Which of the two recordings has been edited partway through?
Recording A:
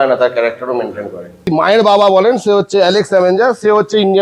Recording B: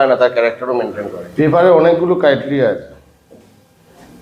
A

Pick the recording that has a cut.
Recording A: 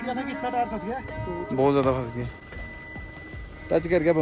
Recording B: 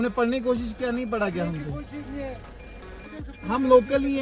B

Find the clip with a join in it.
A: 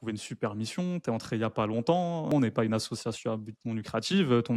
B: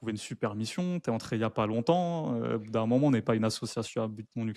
A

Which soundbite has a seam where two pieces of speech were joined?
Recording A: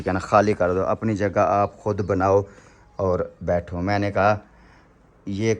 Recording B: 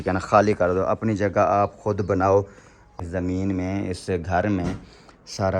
B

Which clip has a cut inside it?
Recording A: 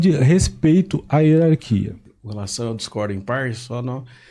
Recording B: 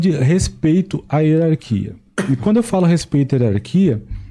A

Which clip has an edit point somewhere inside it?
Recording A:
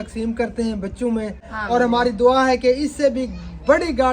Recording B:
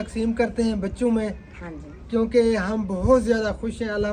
A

